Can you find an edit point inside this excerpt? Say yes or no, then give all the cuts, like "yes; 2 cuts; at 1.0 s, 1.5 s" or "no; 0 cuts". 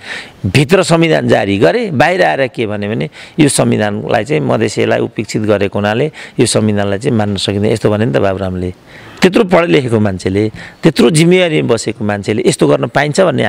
no; 0 cuts